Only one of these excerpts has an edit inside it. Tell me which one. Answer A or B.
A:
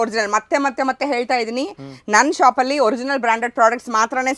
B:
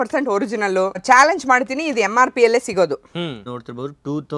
B